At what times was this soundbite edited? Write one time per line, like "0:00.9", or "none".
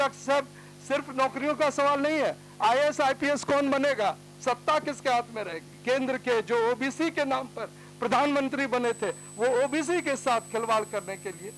0:05.8